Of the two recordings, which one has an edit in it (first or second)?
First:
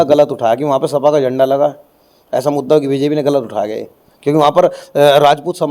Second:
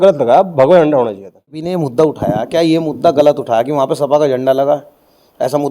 second